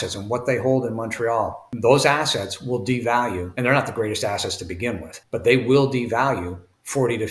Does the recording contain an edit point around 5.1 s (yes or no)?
yes